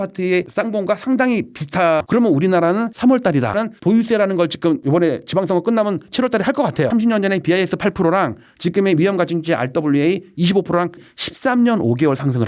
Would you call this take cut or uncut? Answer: cut